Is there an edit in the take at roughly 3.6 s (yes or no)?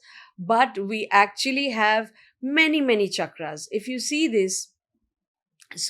no